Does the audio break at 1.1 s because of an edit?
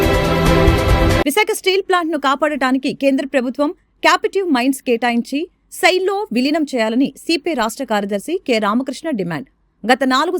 yes; 1 cut; at 1.1 s

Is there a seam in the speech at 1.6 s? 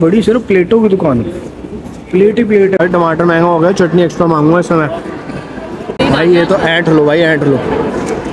no; 2 cuts; at 2.8 s, 6.0 s

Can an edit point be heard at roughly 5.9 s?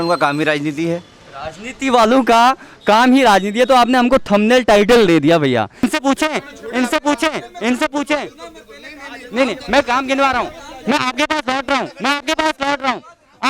yes; 1 cut; at 5.9 s

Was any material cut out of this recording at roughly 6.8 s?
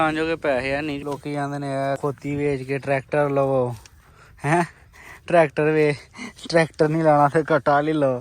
no; 2 cuts; at 1.0 s, 2.0 s

